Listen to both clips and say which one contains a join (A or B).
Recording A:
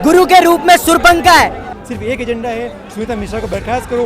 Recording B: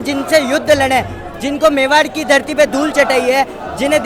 A